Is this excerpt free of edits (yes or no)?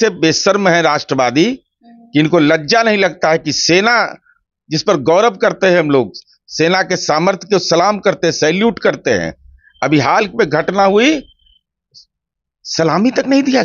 yes